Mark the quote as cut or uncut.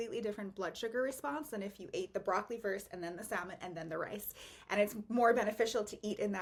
uncut